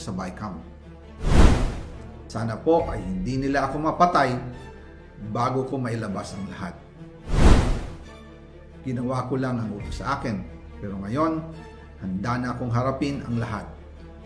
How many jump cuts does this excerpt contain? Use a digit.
1